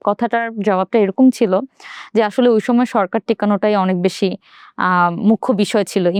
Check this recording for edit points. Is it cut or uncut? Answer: uncut